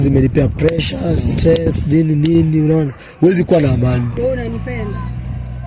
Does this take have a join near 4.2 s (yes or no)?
yes